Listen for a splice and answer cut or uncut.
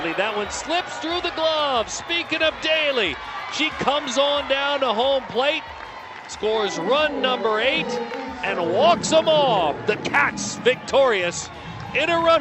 uncut